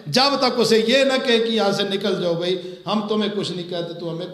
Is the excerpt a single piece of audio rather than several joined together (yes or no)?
yes